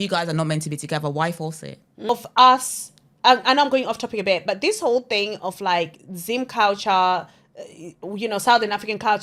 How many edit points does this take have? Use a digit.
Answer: 1